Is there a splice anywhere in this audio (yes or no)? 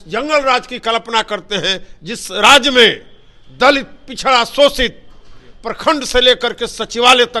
no